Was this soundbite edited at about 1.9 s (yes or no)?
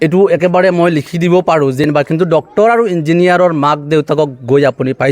yes